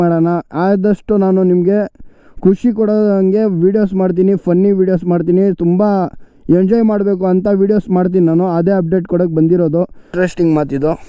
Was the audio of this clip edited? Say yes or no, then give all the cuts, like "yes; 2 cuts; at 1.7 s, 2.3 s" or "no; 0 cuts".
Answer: yes; 1 cut; at 10.1 s